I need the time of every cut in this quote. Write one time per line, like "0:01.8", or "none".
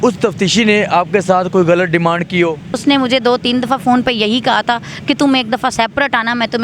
0:02.7